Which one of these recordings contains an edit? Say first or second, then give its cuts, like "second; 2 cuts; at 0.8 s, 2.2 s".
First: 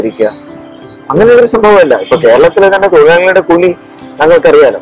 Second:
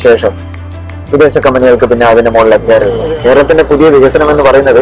second; 1 cut; at 2.9 s